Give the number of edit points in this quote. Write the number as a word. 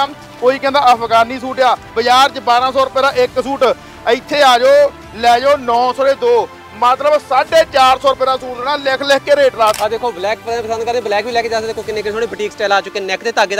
two